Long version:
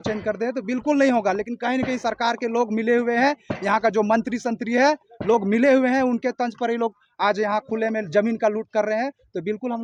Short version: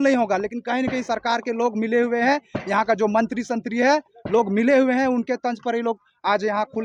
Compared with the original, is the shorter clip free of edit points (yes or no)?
yes